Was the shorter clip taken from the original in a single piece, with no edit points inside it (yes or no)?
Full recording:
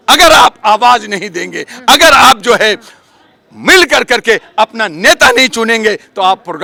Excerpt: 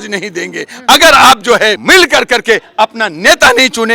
no